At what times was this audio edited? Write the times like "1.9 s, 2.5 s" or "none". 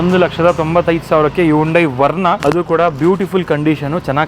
2.4 s